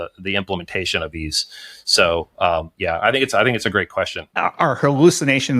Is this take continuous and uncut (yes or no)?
no